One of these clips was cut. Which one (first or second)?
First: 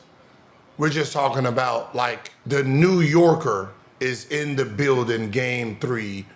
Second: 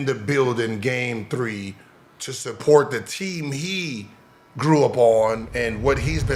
first